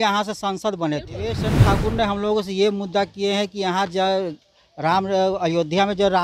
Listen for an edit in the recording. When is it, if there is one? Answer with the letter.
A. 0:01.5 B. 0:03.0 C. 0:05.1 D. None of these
A